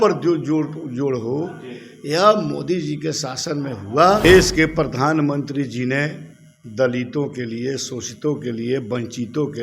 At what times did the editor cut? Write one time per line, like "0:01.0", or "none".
0:04.2